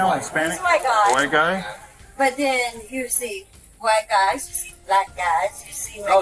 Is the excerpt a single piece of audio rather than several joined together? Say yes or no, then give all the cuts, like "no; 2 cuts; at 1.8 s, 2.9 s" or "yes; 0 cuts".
yes; 0 cuts